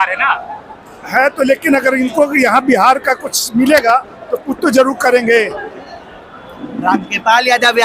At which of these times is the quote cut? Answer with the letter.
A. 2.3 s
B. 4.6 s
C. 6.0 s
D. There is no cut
C